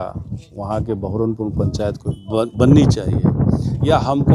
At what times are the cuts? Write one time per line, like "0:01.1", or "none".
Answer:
0:02.1